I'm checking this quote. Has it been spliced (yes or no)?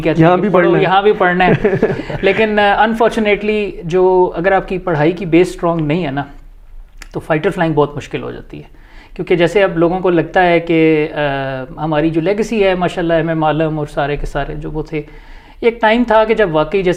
no